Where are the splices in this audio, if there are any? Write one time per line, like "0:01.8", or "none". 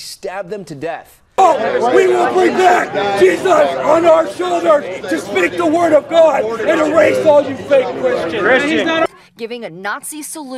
0:01.1